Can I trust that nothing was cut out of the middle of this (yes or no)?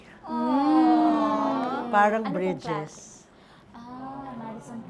yes